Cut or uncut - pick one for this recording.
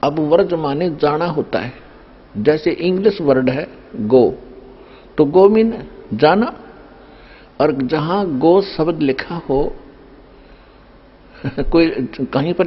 uncut